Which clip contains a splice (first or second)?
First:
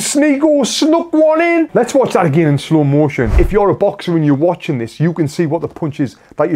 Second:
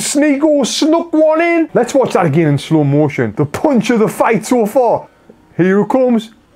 first